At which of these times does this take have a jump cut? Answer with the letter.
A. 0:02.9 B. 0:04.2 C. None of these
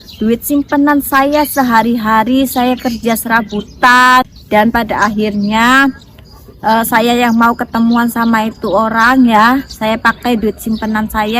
B